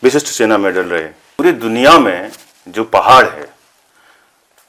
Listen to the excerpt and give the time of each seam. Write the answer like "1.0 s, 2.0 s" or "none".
1.2 s

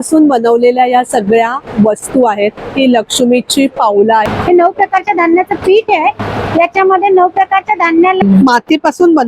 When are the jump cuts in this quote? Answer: 4.3 s, 8.2 s

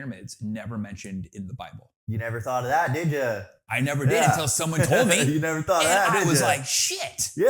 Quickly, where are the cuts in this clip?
1.9 s

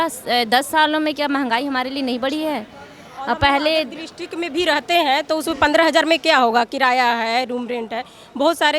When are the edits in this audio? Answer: none

